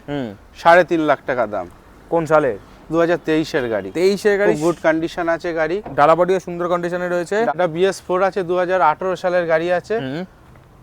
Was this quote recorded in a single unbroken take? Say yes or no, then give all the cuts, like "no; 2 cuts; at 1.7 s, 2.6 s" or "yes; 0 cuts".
no; 1 cut; at 7.5 s